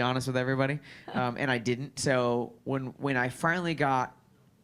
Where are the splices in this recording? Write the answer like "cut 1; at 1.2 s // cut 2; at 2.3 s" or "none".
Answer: none